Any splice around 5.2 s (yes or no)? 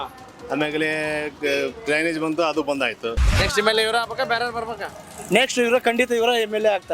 no